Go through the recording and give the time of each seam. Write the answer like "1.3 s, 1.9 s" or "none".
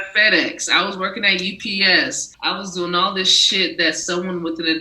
2.3 s